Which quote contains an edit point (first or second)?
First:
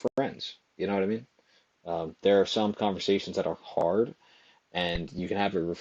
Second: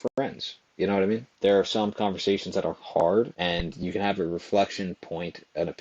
second